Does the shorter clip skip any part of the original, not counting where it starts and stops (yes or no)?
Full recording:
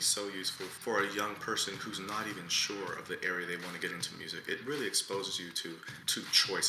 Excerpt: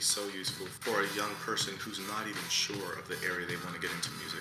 no